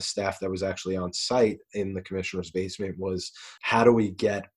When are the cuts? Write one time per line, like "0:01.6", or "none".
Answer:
0:03.5